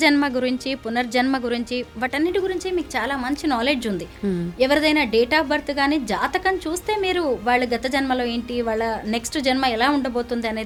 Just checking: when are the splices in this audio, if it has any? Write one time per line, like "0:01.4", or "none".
none